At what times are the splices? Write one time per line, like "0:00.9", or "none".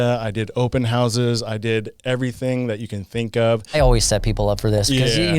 0:03.7